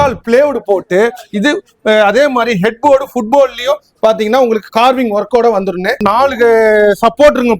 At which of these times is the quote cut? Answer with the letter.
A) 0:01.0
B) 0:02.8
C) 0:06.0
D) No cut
C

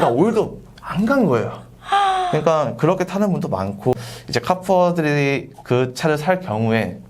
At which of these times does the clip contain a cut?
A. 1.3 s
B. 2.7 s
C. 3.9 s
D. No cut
C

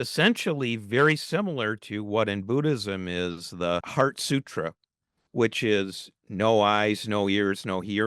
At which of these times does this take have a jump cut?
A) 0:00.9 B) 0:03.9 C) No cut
B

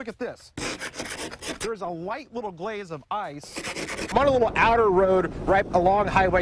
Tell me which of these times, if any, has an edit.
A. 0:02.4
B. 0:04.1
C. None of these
B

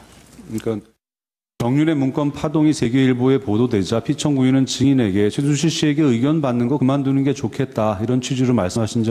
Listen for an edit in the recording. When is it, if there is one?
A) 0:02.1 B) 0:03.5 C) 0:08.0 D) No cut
B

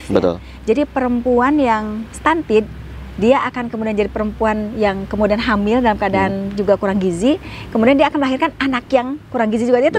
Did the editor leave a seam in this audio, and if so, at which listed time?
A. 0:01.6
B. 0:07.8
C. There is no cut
C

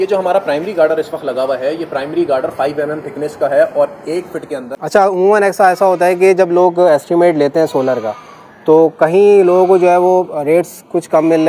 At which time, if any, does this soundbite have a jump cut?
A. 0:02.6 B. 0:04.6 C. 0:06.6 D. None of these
B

